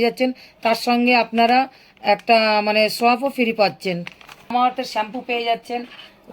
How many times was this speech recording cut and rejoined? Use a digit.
0